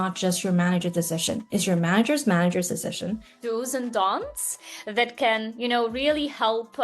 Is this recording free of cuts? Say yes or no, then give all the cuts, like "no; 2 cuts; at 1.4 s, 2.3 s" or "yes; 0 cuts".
no; 1 cut; at 3.3 s